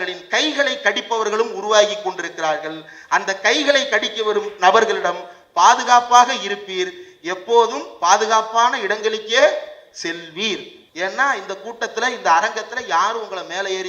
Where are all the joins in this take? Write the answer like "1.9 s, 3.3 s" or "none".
10.8 s